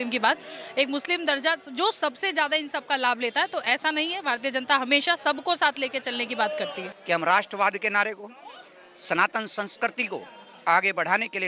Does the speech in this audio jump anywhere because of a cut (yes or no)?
yes